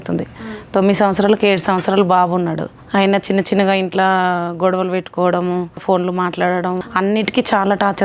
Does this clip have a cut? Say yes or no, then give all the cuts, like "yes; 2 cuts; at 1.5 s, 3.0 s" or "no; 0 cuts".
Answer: yes; 3 cuts; at 2.7 s, 5.8 s, 6.8 s